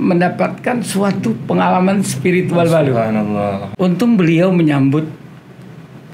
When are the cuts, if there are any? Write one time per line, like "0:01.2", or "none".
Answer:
0:03.6

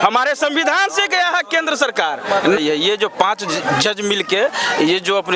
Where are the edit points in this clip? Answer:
0:02.6

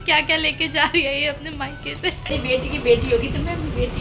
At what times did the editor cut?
0:02.3

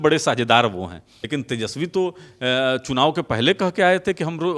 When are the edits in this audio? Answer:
0:01.1

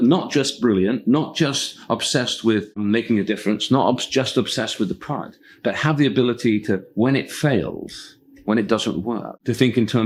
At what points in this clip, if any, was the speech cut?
none

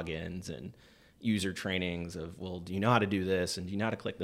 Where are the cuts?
none

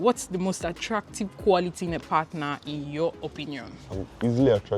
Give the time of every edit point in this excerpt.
0:03.8

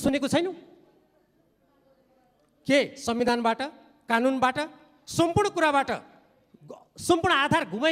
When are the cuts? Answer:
none

